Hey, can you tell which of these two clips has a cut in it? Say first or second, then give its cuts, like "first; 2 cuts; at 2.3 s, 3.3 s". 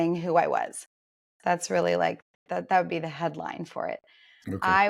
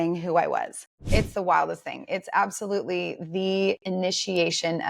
second; 1 cut; at 1.0 s